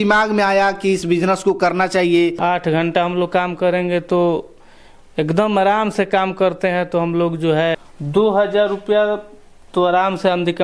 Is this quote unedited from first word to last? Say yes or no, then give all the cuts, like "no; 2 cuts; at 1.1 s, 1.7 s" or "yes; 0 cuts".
no; 2 cuts; at 2.4 s, 7.7 s